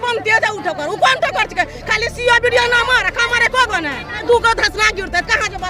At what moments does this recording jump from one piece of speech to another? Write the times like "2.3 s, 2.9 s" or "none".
4.2 s